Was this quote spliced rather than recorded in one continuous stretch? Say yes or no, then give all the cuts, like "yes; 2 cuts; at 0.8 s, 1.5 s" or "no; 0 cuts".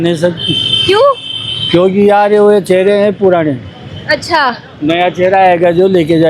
no; 0 cuts